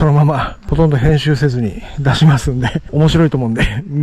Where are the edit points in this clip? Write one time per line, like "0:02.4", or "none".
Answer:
none